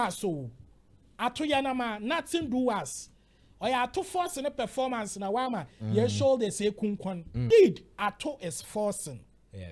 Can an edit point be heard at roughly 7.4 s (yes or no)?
yes